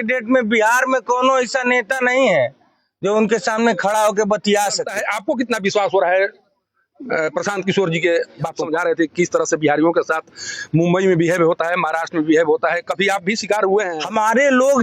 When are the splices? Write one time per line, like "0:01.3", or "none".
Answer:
0:04.9
0:08.6
0:13.9